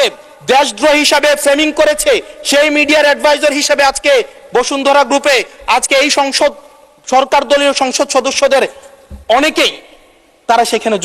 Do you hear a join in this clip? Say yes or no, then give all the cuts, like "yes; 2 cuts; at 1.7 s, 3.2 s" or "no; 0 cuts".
no; 0 cuts